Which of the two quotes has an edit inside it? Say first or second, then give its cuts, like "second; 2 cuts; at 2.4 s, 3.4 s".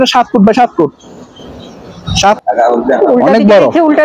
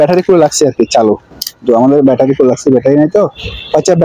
first; 1 cut; at 2.4 s